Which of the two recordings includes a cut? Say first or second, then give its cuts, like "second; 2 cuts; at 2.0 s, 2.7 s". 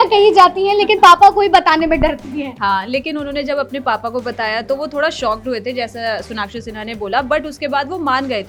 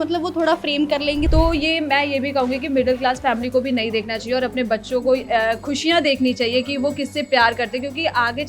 second; 1 cut; at 1.3 s